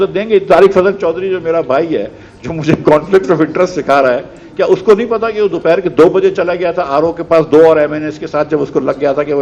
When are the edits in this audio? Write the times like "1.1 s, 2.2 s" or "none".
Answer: none

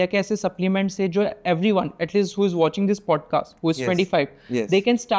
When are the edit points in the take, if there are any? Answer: none

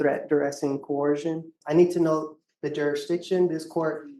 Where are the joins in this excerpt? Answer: 1.6 s

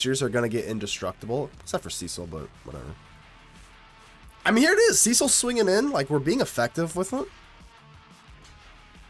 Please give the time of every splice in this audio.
none

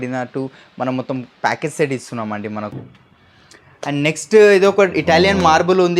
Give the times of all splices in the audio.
2.7 s

